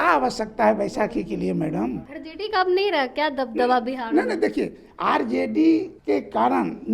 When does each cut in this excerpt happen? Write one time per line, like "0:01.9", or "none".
0:02.1
0:05.9